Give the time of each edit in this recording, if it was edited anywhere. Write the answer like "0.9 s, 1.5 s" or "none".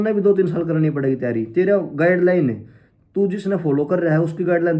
none

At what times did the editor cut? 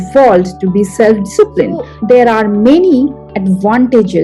1.9 s

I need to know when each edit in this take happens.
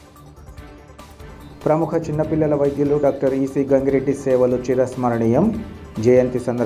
1.3 s

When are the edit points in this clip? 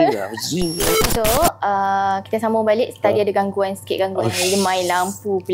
0.9 s

